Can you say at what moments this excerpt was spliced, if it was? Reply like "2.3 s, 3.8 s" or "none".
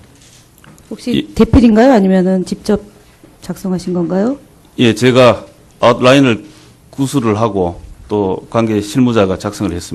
none